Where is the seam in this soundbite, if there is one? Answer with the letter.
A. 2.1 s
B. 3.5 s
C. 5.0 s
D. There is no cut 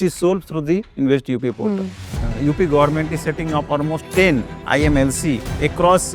A